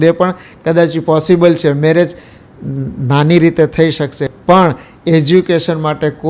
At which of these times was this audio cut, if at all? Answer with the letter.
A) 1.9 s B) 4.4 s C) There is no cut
C